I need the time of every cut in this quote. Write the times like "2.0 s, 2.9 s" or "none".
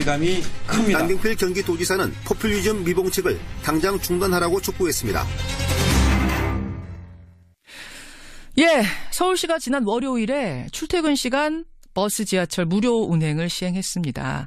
none